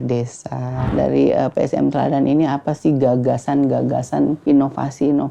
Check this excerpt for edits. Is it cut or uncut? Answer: cut